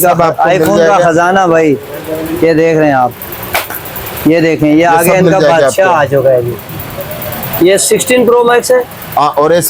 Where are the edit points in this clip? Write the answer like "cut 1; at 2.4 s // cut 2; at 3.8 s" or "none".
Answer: none